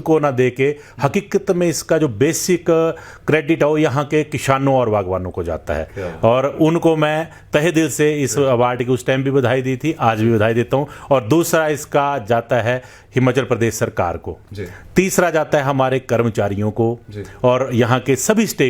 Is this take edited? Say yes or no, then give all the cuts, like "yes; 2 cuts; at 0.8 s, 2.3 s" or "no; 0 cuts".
no; 0 cuts